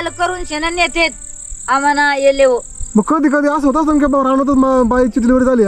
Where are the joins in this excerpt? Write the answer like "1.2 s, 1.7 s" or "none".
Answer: none

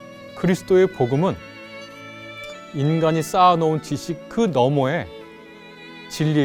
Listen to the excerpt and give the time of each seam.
none

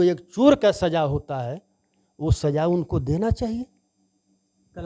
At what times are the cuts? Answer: none

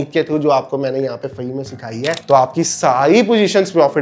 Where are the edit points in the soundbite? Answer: 2.2 s

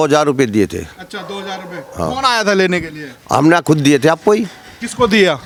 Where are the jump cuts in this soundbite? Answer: none

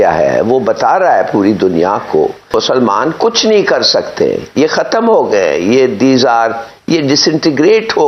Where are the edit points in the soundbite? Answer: 2.5 s

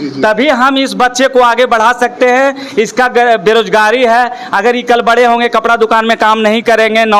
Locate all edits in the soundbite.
none

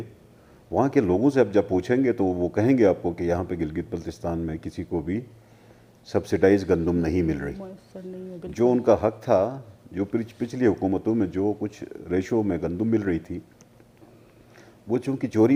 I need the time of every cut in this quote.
none

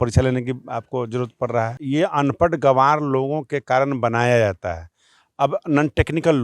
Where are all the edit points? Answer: 1.8 s

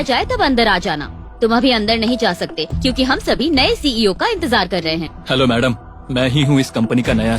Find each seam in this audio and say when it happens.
5.1 s

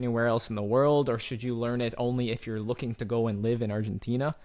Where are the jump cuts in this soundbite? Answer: none

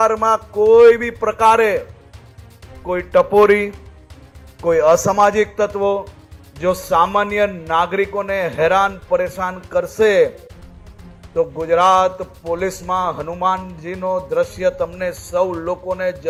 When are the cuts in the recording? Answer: none

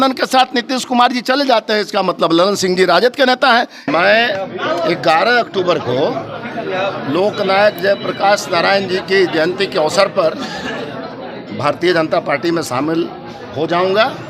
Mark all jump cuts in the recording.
3.8 s

